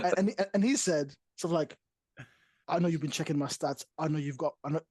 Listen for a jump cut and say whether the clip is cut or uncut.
uncut